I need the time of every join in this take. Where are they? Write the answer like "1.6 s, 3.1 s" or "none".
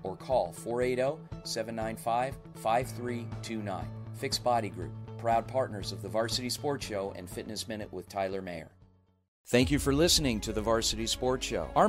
9.5 s